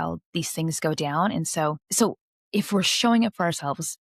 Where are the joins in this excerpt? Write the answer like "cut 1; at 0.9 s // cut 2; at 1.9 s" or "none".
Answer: cut 1; at 1.8 s